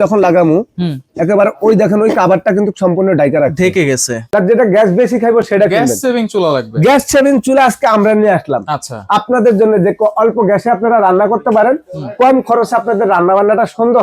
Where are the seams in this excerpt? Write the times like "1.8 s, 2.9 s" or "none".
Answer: 4.1 s